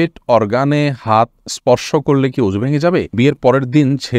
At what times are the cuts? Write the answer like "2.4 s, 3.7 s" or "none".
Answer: 3.1 s